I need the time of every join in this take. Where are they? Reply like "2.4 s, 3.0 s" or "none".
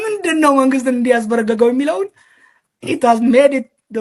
none